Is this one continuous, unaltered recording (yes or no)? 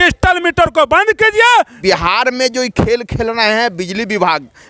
no